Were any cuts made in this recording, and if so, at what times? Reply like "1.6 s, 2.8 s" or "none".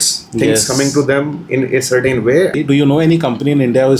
2.6 s

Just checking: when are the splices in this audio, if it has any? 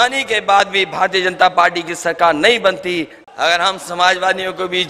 3.2 s

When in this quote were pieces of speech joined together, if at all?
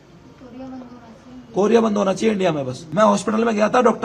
2.8 s

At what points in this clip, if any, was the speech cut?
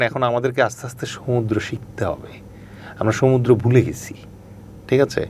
none

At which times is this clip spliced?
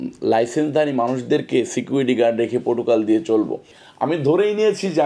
3.8 s

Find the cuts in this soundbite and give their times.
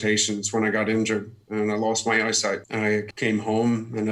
3.0 s

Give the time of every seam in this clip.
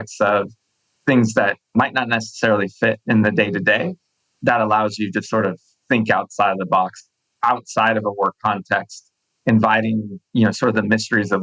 7.2 s, 10.2 s

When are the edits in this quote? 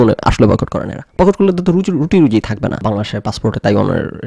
2.8 s

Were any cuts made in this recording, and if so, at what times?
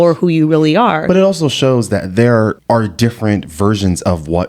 1.0 s, 2.6 s

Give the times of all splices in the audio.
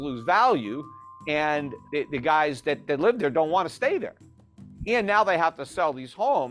1.8 s

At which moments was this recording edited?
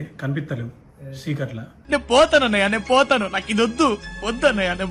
none

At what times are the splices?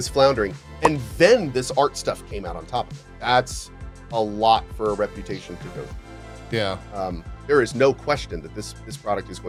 none

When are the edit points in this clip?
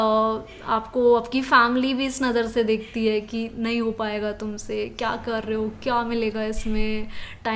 none

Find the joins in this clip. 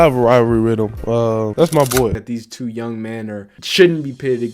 2.3 s, 3.6 s

